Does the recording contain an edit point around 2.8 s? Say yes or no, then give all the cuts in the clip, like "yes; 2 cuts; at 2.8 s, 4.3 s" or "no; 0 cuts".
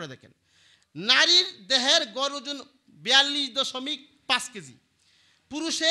no; 0 cuts